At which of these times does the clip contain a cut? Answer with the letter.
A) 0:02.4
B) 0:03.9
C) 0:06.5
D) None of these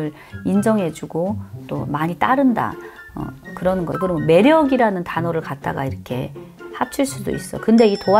B